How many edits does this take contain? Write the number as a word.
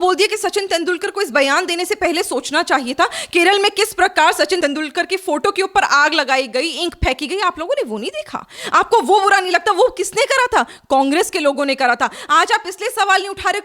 one